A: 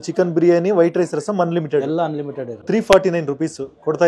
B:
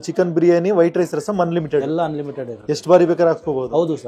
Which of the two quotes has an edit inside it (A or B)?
A